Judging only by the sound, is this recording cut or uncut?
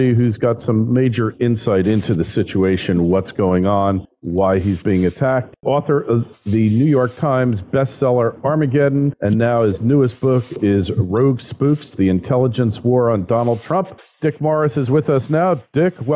cut